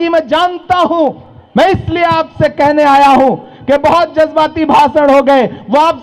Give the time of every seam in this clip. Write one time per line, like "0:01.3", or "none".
none